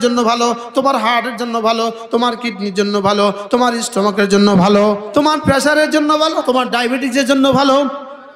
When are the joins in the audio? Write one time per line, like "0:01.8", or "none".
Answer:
0:05.0
0:06.4